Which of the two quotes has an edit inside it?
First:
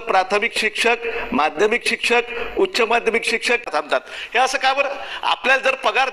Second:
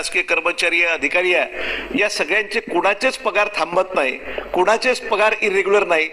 first; 1 cut; at 3.7 s

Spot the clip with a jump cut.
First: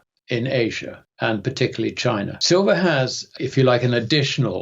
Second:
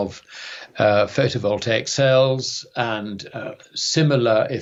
first; 2 cuts; at 2.4 s, 3.3 s

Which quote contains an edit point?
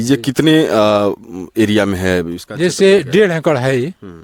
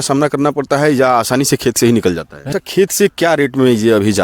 second; 1 cut; at 2.3 s

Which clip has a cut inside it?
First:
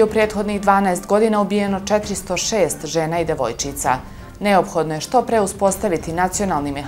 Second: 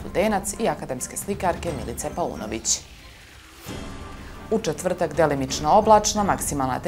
second; 2 cuts; at 2.8 s, 4.5 s

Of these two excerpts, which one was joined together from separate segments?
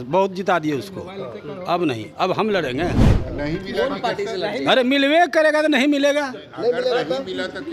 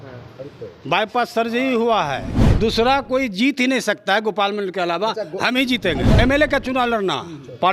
second; 2 cuts; at 2.4 s, 6.1 s

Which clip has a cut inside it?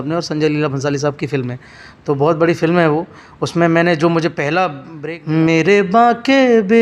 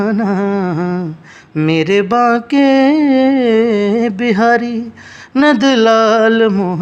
first; 1 cut; at 4.9 s

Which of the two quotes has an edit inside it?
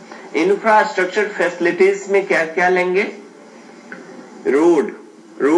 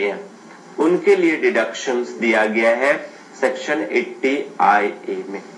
second; 1 cut; at 1.8 s

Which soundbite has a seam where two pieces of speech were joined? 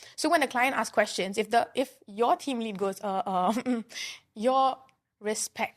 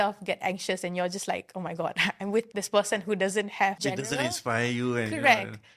second; 2 cuts; at 2.5 s, 3.8 s

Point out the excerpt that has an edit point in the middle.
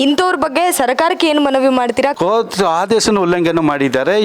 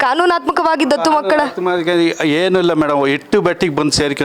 first; 1 cut; at 2.2 s

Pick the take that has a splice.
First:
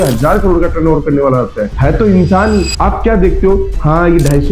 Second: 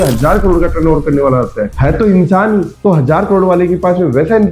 first; 1 cut; at 2.7 s

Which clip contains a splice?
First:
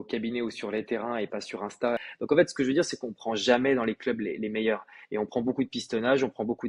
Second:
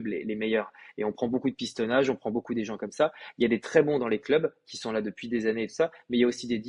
first; 1 cut; at 2.1 s

